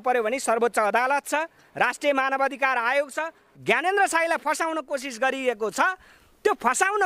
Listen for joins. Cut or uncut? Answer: cut